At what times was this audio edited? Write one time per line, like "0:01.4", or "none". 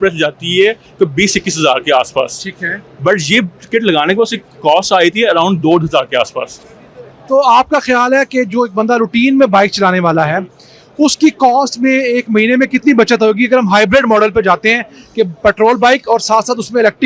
none